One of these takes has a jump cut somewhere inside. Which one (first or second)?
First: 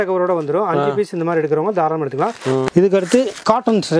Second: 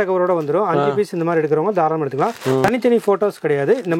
first